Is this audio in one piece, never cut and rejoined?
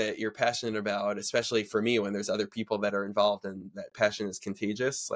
yes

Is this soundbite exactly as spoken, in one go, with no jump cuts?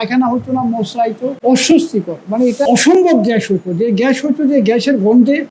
no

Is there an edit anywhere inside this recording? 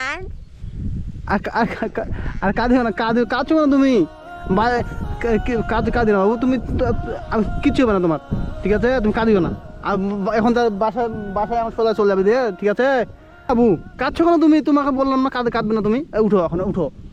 no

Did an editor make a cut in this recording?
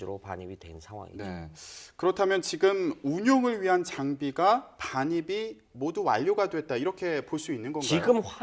yes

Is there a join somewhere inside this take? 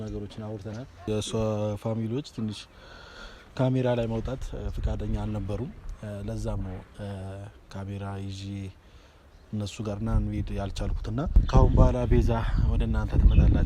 yes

